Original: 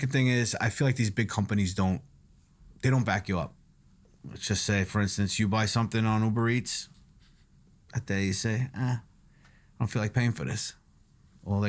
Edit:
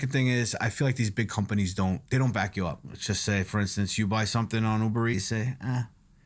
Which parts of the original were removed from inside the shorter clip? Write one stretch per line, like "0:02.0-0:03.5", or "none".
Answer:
0:02.0-0:02.8
0:03.6-0:04.3
0:06.5-0:08.3